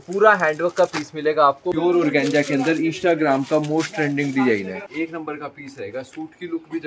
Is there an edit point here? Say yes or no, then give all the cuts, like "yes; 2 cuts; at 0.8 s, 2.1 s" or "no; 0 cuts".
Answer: yes; 2 cuts; at 1.7 s, 4.8 s